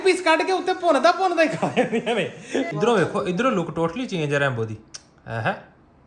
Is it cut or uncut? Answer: cut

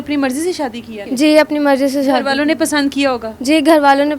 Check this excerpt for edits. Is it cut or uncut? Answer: cut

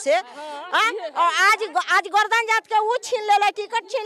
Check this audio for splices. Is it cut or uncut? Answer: uncut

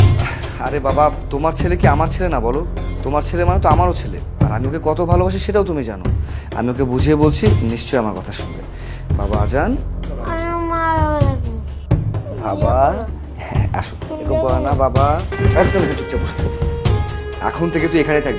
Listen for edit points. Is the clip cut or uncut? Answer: cut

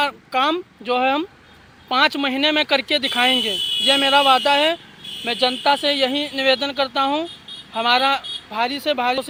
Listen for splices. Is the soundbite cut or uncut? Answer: uncut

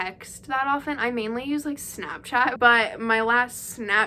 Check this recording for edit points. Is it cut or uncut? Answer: cut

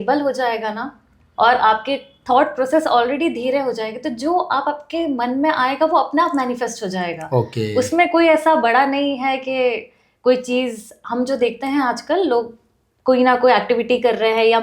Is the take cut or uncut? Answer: uncut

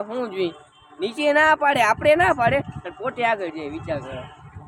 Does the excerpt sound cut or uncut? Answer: uncut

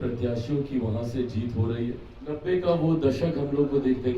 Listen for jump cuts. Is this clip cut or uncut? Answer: cut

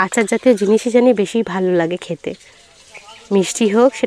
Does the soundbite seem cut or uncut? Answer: uncut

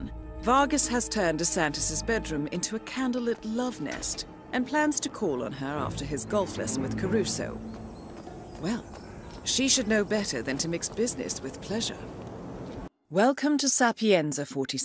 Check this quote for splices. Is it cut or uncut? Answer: uncut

